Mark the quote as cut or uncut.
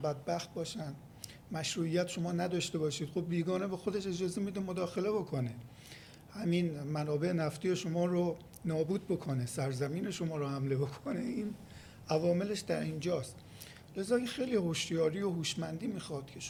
uncut